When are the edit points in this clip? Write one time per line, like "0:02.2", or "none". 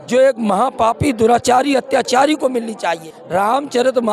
0:03.1